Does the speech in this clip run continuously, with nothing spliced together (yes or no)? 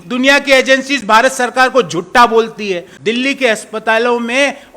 no